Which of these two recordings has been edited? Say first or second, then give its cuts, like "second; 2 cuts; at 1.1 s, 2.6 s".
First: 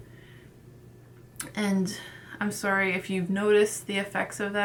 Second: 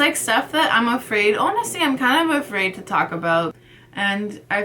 second; 1 cut; at 3.6 s